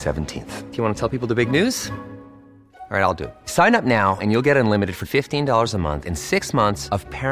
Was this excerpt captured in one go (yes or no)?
yes